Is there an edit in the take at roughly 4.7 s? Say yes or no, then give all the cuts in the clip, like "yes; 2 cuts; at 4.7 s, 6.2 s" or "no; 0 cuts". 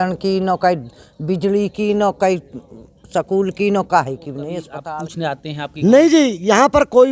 yes; 1 cut; at 4.7 s